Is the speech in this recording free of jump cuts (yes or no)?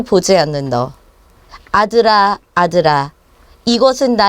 yes